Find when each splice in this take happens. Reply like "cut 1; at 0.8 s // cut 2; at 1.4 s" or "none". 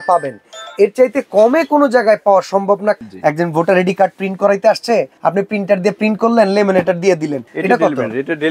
cut 1; at 3.0 s // cut 2; at 5.1 s // cut 3; at 7.5 s